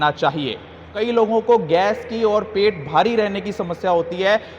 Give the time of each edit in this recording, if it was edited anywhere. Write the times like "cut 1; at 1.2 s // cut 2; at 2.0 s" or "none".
cut 1; at 1.1 s